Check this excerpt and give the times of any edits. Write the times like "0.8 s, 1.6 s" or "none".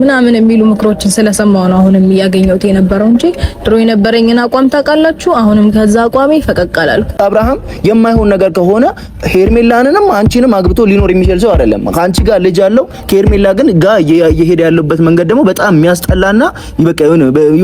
7.2 s